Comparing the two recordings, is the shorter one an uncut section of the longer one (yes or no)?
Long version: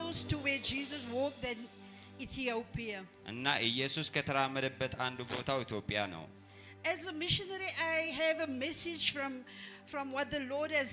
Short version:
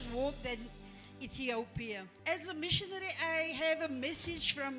no